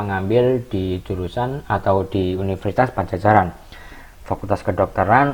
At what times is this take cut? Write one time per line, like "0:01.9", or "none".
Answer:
none